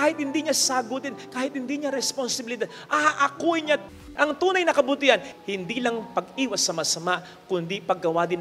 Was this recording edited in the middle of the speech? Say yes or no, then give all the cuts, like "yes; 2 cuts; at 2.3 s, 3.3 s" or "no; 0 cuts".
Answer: yes; 2 cuts; at 4.0 s, 5.3 s